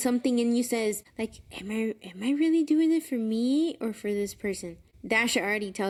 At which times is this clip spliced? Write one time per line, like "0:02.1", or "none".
none